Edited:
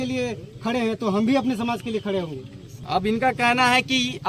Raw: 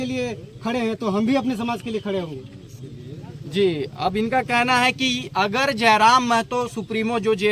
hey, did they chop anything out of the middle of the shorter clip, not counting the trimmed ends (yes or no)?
yes